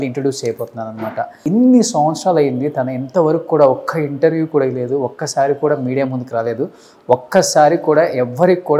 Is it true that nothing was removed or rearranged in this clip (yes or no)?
no